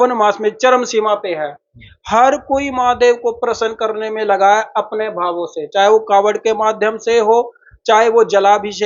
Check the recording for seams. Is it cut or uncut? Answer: uncut